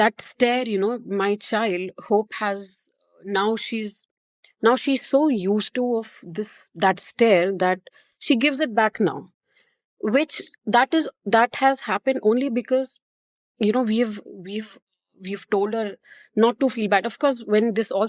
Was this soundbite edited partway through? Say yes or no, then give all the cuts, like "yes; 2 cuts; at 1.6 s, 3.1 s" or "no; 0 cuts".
no; 0 cuts